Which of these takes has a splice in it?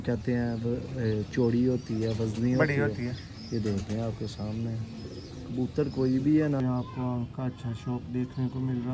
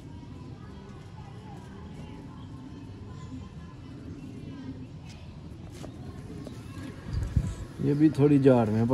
first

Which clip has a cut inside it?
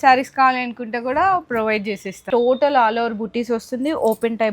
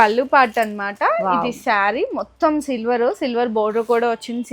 first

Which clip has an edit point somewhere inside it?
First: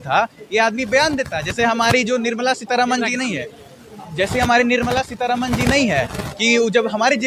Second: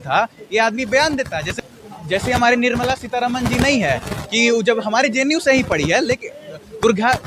second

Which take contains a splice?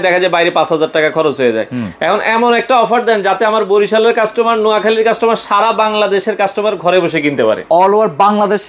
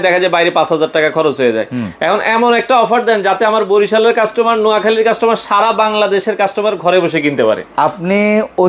first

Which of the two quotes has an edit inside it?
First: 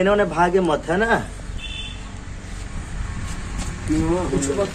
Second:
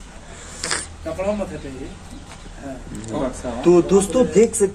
second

